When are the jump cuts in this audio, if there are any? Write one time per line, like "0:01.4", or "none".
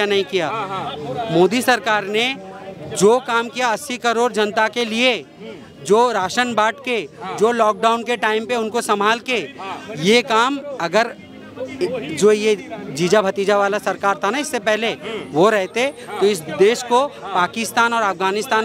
none